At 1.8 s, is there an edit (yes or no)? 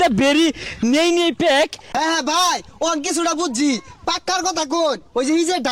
yes